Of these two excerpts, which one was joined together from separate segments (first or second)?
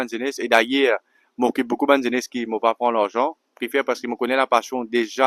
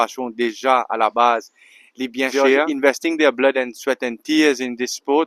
second